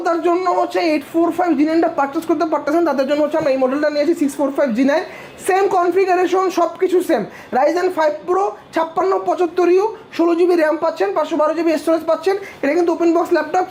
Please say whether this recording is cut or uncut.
uncut